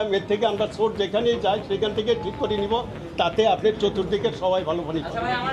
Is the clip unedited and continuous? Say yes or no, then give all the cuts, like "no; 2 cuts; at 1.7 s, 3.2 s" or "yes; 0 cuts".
yes; 0 cuts